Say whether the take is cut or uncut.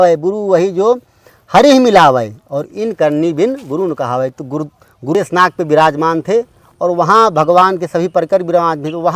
cut